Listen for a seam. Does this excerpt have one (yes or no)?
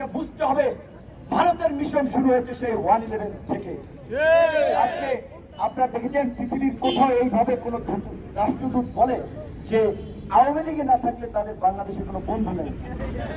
no